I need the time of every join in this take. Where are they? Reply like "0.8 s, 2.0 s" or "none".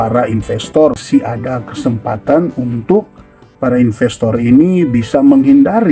1.0 s